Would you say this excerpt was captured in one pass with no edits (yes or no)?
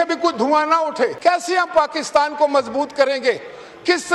no